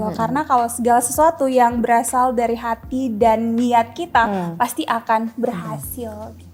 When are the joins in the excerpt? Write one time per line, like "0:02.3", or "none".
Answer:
none